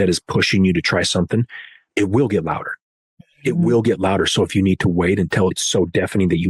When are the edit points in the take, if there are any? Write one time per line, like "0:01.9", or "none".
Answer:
0:01.9
0:05.6